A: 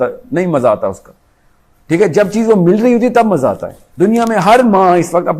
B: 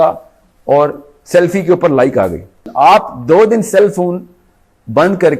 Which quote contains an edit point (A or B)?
B